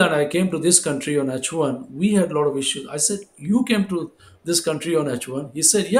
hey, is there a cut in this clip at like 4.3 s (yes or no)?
no